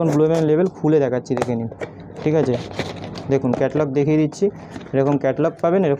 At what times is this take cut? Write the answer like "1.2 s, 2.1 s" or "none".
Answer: none